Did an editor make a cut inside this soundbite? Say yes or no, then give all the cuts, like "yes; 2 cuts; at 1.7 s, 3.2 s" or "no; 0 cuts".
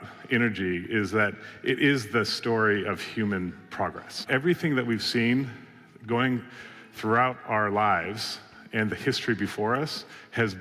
yes; 1 cut; at 4.2 s